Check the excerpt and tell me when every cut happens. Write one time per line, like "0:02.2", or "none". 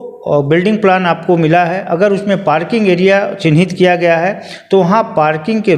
none